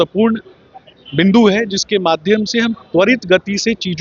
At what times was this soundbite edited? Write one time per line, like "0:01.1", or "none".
none